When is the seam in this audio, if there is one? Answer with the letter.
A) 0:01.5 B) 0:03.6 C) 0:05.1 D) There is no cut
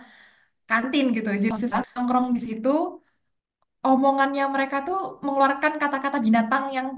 A